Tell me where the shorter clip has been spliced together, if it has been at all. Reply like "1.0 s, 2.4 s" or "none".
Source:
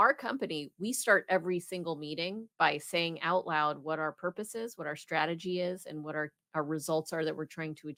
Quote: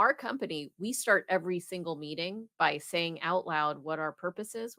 none